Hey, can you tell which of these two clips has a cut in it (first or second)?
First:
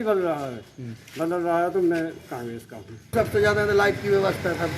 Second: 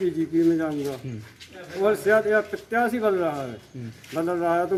first